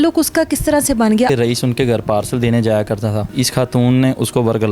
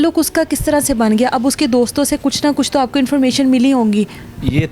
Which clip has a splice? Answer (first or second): first